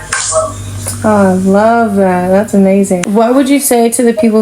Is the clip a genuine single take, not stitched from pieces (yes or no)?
no